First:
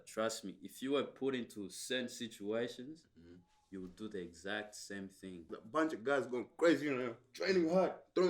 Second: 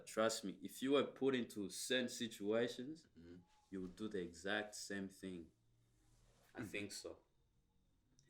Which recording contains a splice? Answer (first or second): first